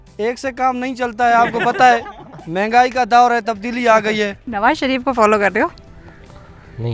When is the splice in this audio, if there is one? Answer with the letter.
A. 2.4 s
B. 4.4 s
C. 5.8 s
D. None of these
B